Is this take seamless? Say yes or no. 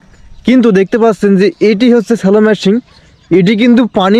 yes